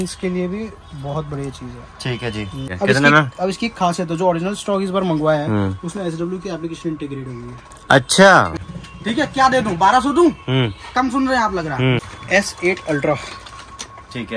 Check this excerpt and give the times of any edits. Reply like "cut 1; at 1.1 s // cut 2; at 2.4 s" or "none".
cut 1; at 2.7 s // cut 2; at 8.7 s // cut 3; at 12.0 s